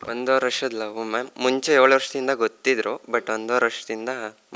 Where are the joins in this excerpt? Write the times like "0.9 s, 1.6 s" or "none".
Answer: none

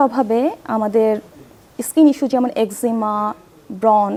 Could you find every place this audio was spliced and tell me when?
none

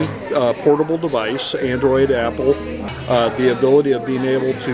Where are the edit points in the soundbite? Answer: 2.8 s

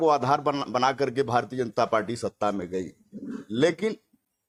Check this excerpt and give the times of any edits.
none

